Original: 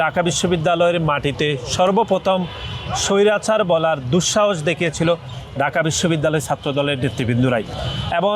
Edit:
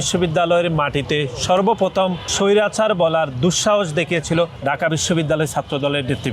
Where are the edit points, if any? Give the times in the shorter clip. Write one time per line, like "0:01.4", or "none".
0:02.2
0:04.5